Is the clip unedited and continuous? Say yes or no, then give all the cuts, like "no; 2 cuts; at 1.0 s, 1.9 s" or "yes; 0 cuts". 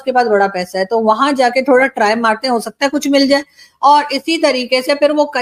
yes; 0 cuts